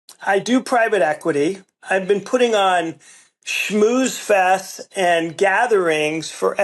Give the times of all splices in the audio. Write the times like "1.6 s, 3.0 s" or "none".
1.8 s